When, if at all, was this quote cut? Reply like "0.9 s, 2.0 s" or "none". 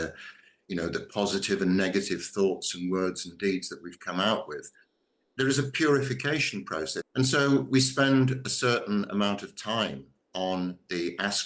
7.0 s